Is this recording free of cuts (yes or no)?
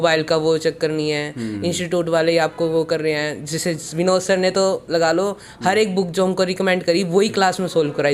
yes